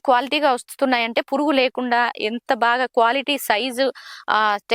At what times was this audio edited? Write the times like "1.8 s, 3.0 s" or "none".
none